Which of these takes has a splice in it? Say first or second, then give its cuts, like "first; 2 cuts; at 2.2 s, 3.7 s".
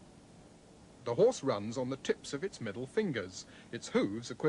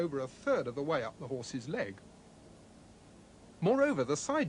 second; 1 cut; at 3.5 s